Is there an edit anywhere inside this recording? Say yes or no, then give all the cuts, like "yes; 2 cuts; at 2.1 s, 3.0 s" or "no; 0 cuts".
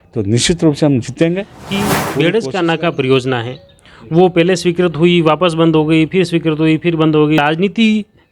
yes; 2 cuts; at 1.8 s, 7.4 s